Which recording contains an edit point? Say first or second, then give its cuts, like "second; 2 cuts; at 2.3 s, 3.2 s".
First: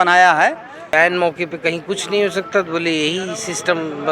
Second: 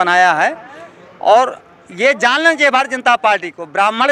first; 1 cut; at 0.9 s